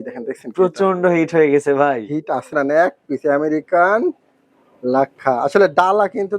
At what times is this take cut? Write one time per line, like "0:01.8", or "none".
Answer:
0:02.5